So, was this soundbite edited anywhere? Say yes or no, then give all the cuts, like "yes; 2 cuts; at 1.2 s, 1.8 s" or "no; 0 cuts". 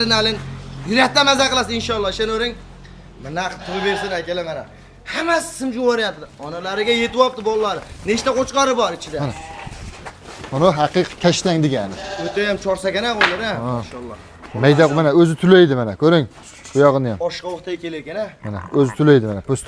no; 0 cuts